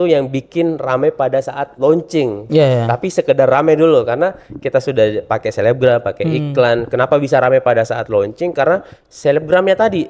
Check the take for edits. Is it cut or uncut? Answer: uncut